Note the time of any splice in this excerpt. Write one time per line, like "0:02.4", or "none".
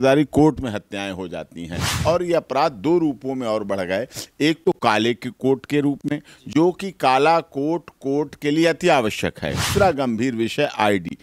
0:01.9
0:09.7